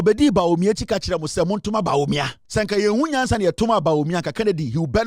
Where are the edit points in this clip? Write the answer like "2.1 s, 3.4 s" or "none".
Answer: 2.4 s